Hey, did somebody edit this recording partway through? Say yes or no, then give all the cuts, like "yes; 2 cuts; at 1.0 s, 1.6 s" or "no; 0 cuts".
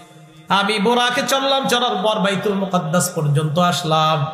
no; 0 cuts